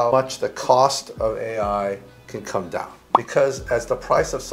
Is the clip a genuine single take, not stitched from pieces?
no; 1 cut; at 2.9 s

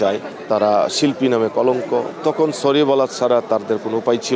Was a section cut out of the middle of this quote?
yes; 1 cut; at 2.1 s

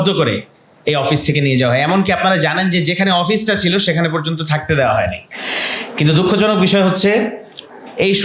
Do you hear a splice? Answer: no; 0 cuts

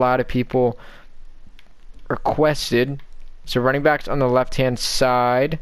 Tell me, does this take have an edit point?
yes; 1 cut; at 3.3 s

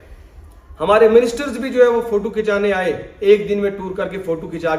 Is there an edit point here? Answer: no; 0 cuts

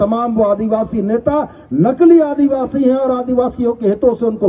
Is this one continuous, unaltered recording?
yes; 0 cuts

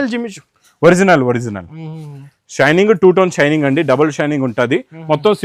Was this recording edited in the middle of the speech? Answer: no; 0 cuts

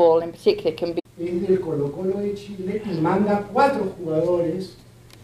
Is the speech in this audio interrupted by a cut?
no; 0 cuts

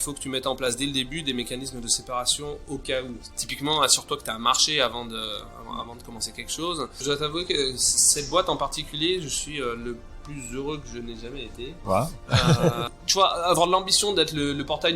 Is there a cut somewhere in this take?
yes; 3 cuts; at 3.3 s, 7.0 s, 13.0 s

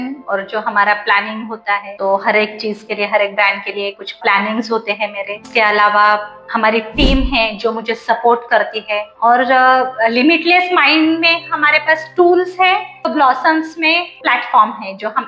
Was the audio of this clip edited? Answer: no; 0 cuts

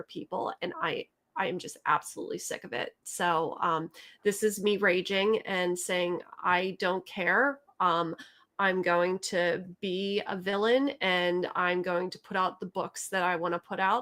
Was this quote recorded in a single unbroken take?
yes; 0 cuts

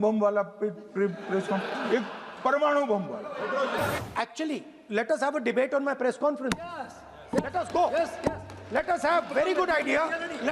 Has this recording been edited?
yes; 1 cut; at 4.0 s

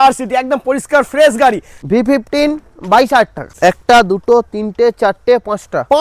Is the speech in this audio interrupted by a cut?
yes; 2 cuts; at 1.7 s, 3.5 s

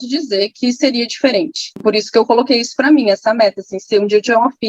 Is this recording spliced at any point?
no; 0 cuts

